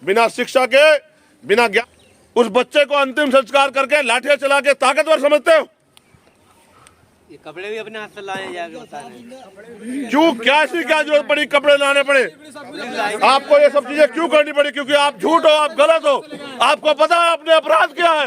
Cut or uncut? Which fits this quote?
cut